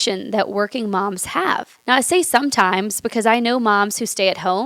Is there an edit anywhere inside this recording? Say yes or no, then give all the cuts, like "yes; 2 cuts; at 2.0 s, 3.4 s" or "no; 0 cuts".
yes; 1 cut; at 1.7 s